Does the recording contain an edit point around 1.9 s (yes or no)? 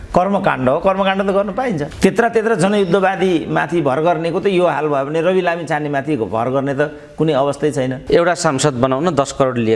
yes